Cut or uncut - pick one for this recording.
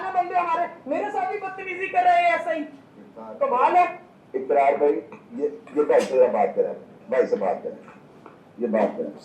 uncut